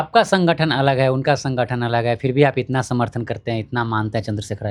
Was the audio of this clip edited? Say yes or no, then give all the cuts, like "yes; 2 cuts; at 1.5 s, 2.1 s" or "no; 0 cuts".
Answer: no; 0 cuts